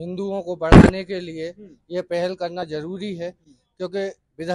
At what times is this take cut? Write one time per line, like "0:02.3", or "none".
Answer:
none